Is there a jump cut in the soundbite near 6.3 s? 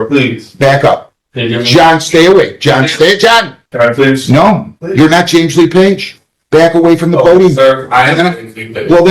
no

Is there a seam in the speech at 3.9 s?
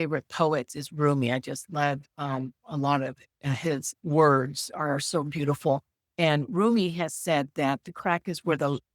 yes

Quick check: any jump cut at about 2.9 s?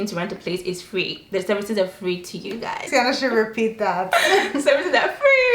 yes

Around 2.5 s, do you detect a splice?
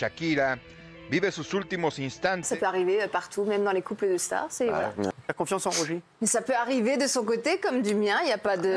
yes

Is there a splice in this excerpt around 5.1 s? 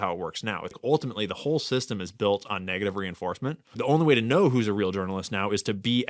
no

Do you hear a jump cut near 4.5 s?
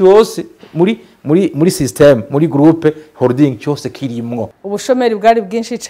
yes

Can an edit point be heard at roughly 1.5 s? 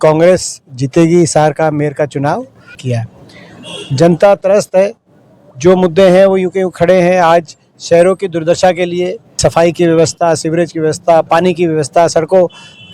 no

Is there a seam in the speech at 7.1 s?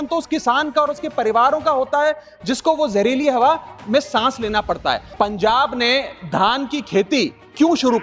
no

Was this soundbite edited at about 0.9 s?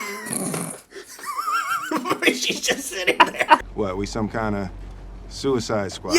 no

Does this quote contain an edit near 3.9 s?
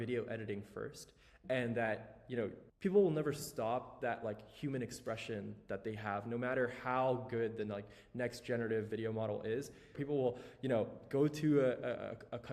no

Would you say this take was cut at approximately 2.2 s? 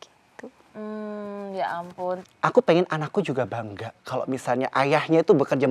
yes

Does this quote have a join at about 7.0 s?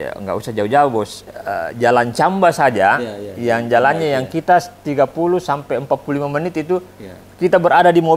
no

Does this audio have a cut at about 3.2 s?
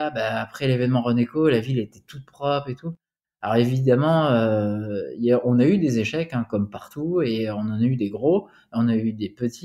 yes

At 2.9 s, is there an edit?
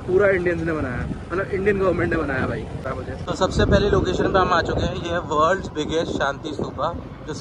yes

